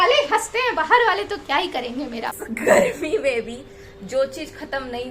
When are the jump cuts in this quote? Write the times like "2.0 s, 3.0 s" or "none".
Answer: 2.4 s